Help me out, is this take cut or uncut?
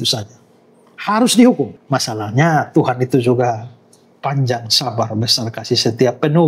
cut